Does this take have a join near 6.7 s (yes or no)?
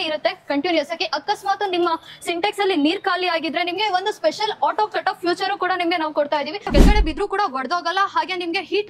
yes